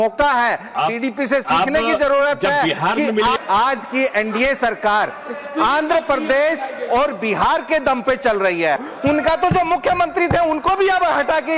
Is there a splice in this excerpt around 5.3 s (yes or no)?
no